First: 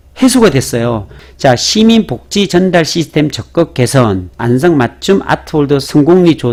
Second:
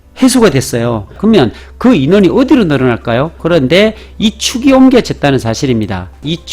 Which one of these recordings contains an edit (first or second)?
second